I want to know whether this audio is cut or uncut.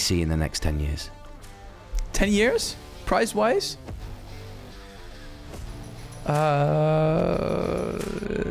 uncut